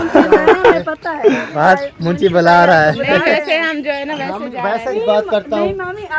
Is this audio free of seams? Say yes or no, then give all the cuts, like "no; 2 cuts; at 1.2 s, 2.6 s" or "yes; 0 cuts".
no; 2 cuts; at 1.5 s, 4.9 s